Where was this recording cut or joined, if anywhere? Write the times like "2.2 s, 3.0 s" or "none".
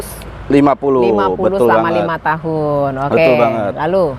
none